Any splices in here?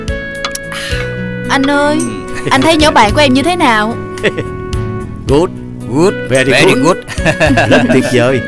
no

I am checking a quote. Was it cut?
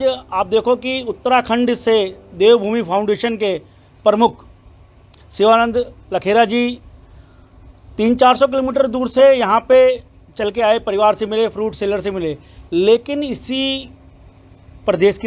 no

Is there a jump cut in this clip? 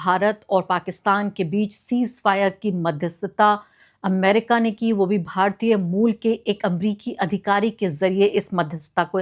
no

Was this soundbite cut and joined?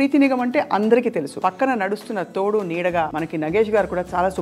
yes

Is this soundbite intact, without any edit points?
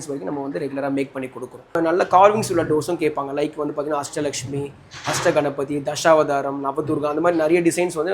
no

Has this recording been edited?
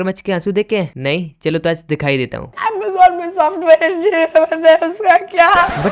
yes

